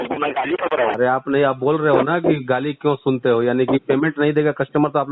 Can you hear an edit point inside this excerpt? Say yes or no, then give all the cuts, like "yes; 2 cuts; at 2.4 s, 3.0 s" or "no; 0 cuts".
yes; 1 cut; at 0.9 s